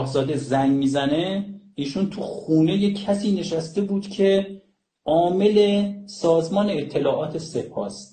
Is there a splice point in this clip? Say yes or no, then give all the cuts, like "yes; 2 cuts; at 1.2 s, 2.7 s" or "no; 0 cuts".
no; 0 cuts